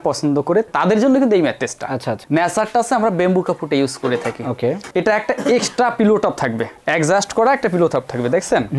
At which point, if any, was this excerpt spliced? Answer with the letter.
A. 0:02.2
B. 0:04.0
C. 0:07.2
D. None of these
A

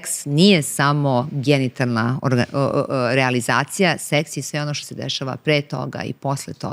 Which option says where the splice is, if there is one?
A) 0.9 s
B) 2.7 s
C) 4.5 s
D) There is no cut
D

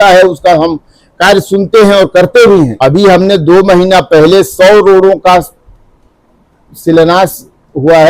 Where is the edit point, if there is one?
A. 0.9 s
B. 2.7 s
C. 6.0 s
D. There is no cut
B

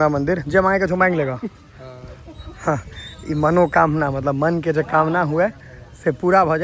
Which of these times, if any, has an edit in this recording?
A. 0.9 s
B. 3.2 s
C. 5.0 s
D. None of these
D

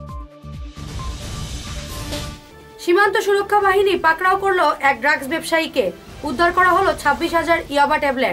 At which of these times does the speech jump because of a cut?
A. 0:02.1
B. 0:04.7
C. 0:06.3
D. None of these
A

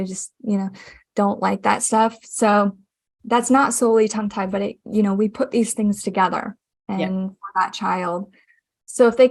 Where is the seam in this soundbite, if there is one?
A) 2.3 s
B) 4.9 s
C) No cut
C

